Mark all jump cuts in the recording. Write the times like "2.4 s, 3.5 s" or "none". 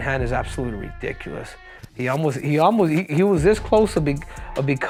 none